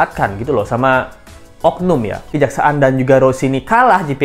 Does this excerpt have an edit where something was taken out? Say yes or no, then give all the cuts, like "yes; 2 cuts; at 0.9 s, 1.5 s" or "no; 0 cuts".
yes; 1 cut; at 2.3 s